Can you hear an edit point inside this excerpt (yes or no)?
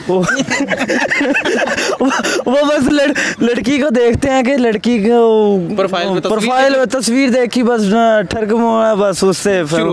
no